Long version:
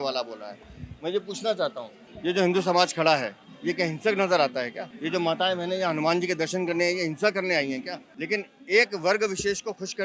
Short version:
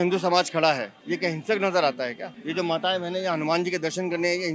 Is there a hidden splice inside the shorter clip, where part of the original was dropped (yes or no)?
yes